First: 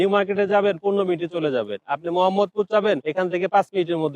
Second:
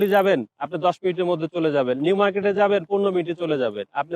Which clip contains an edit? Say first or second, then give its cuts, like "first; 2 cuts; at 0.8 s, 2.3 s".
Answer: first; 1 cut; at 3.1 s